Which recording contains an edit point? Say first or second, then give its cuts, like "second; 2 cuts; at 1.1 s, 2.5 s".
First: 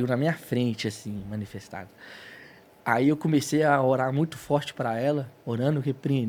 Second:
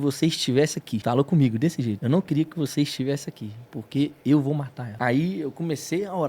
second; 3 cuts; at 1.0 s, 2.0 s, 4.8 s